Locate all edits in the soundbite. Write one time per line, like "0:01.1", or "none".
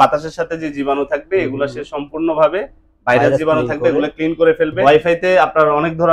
0:04.8